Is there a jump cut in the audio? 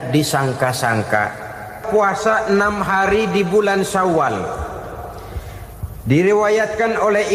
yes; 1 cut; at 1.8 s

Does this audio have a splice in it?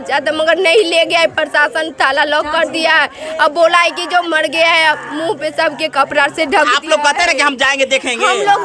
no; 0 cuts

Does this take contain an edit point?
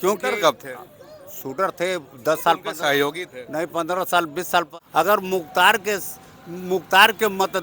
yes; 1 cut; at 4.7 s

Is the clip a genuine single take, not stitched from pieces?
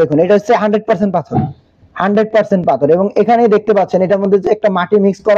yes; 0 cuts

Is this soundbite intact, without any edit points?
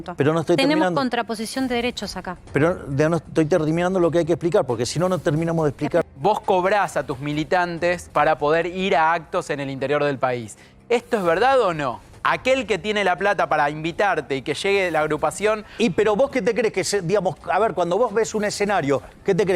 no; 3 cuts; at 6.0 s, 8.1 s, 12.1 s

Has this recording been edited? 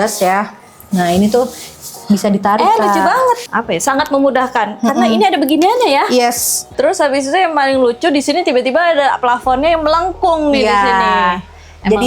yes; 2 cuts; at 3.4 s, 6.7 s

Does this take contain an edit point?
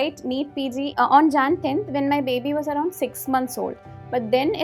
yes; 1 cut; at 0.9 s

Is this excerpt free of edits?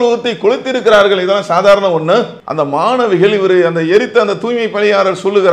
no; 1 cut; at 2.4 s

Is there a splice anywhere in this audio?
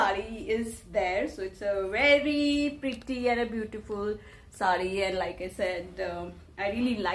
no; 0 cuts

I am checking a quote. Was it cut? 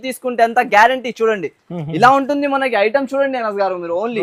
no; 0 cuts

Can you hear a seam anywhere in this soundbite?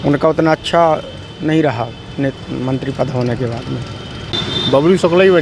yes; 1 cut; at 4.3 s

